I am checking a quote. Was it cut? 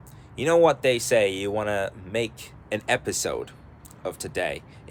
no; 0 cuts

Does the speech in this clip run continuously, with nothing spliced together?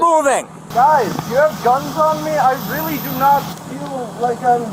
yes; 0 cuts

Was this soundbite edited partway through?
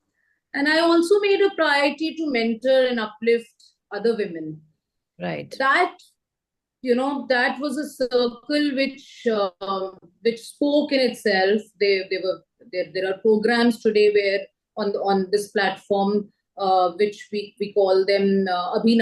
no; 0 cuts

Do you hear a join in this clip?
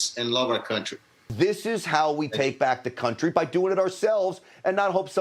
yes; 1 cut; at 1.2 s

